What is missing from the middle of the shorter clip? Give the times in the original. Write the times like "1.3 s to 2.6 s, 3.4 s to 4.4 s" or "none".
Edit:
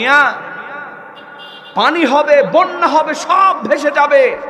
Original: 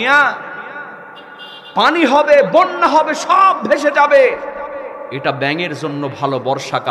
none